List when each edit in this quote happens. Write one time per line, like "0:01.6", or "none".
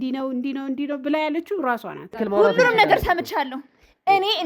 0:02.2